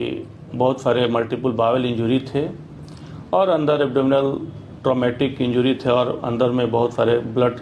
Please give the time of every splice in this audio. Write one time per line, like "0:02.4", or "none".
none

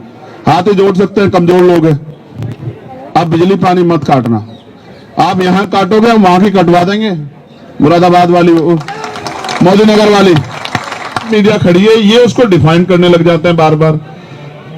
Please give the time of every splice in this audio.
0:11.3

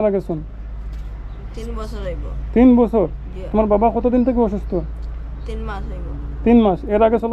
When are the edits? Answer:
none

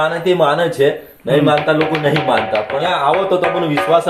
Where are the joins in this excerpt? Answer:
0:02.8

